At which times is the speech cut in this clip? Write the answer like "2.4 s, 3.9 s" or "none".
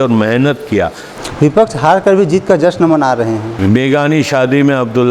1.1 s, 3.5 s